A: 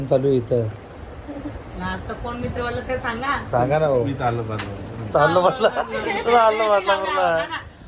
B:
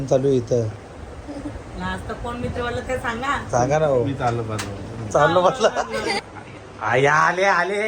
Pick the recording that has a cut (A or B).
B